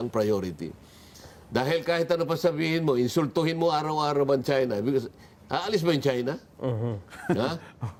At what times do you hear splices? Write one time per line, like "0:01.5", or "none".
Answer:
none